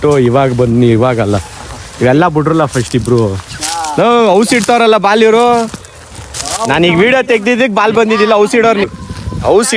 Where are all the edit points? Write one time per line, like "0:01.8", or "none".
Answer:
0:08.9